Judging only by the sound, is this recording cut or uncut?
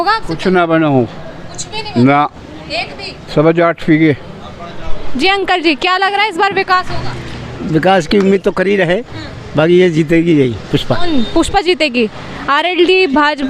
uncut